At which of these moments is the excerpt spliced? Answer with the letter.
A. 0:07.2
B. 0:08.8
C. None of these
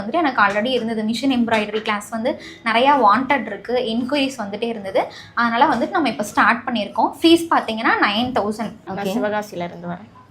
B